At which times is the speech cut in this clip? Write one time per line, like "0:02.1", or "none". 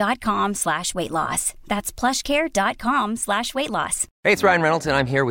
0:04.0